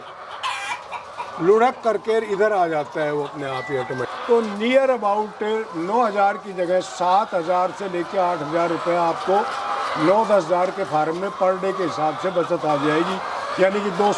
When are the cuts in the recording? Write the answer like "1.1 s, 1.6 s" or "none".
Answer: 4.0 s